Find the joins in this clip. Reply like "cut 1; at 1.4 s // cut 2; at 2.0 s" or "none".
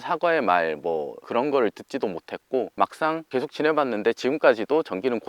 cut 1; at 1.2 s // cut 2; at 3.1 s